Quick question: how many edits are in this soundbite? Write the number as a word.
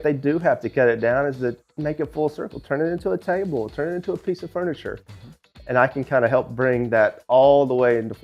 zero